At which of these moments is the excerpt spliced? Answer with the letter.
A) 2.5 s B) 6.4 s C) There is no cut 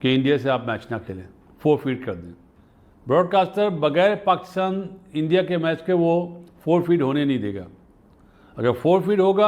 A